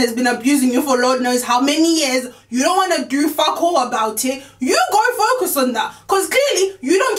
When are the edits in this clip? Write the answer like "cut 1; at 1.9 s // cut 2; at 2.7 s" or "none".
none